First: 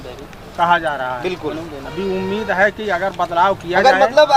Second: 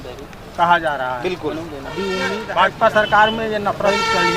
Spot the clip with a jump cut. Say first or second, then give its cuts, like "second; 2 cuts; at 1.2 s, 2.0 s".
second; 1 cut; at 2.4 s